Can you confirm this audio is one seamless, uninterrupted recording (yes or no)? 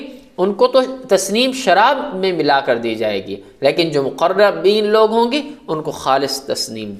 yes